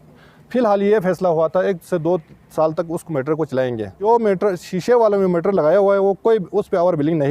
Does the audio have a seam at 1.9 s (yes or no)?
no